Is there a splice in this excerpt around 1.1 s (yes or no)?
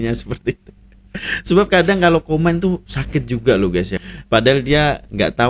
no